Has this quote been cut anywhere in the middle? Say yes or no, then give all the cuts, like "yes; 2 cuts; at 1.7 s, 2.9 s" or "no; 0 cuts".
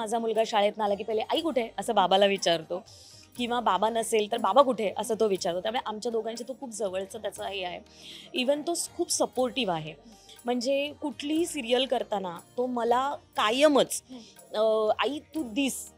no; 0 cuts